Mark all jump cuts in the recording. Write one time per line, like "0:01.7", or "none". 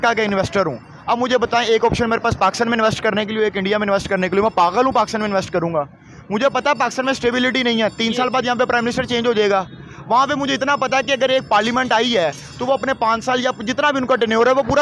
none